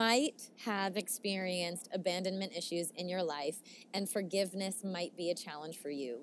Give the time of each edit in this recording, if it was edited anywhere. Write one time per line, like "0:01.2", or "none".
none